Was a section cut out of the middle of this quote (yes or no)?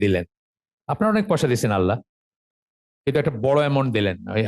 no